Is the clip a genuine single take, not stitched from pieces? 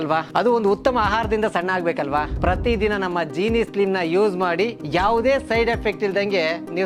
yes; 0 cuts

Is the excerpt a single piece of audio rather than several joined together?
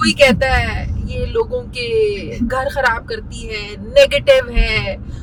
yes; 0 cuts

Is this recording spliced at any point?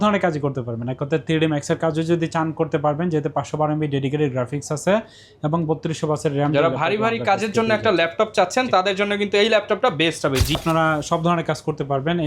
yes; 1 cut; at 10.5 s

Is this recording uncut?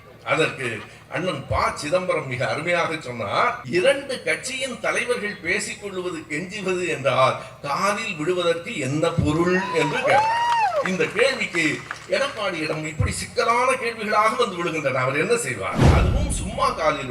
no; 2 cuts; at 3.6 s, 15.9 s

